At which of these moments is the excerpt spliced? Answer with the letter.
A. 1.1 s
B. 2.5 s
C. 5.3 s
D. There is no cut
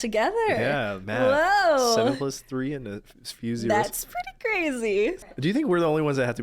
C